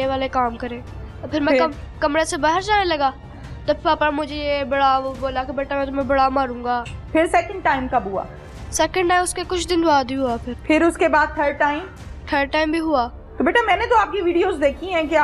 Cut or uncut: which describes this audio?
cut